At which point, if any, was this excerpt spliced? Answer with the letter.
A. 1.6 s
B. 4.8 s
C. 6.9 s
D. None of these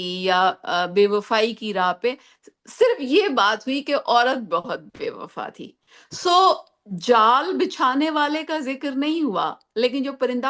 D